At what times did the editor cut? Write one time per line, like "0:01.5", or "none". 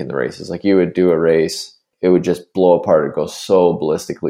0:01.9